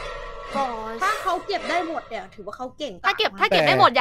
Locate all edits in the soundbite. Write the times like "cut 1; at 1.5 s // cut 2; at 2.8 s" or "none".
cut 1; at 3.0 s